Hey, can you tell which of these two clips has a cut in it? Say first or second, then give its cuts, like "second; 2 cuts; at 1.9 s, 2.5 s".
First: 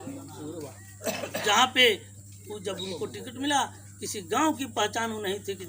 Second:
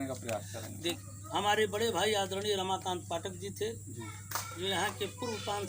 second; 1 cut; at 1.0 s